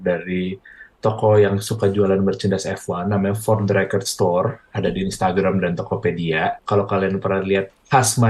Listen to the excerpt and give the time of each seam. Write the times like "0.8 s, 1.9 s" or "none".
6.6 s